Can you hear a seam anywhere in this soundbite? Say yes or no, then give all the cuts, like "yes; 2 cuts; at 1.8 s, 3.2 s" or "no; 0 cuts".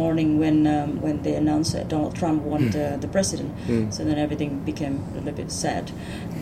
no; 0 cuts